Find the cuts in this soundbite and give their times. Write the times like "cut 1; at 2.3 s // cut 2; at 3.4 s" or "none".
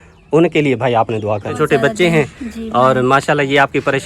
cut 1; at 1.5 s